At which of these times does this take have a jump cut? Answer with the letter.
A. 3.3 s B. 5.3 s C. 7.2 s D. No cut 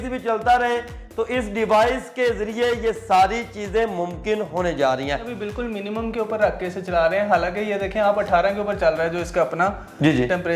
B